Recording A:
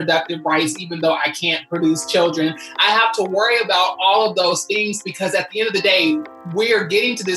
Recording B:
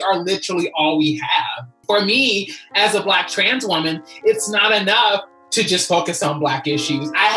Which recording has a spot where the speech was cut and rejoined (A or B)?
B